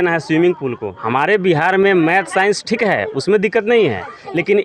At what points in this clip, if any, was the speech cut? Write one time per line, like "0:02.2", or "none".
0:00.9

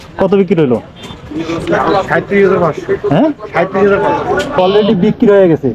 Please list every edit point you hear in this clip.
none

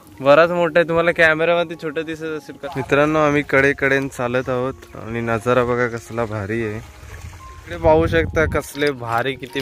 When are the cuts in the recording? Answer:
0:02.5
0:07.8

